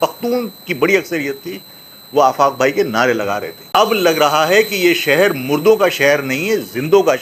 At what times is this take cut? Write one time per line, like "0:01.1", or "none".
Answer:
0:03.6

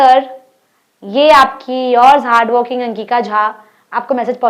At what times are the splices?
none

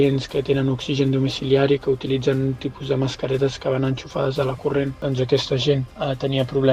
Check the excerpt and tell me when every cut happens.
none

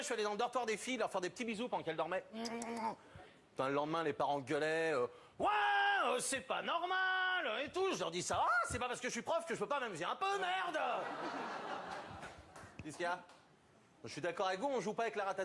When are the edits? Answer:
none

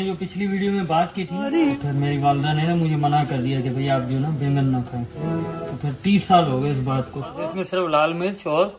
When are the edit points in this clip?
0:01.5
0:07.3

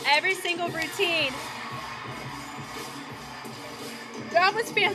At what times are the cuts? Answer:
none

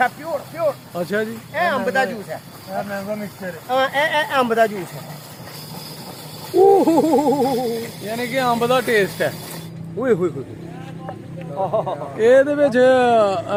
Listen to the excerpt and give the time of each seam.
none

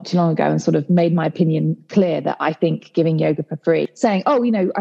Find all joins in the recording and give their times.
0:03.9

